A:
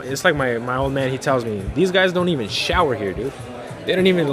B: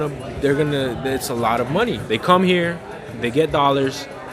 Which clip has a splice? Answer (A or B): B